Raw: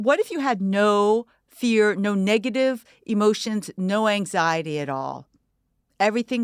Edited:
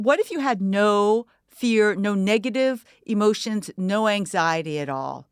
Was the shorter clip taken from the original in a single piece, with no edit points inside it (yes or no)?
yes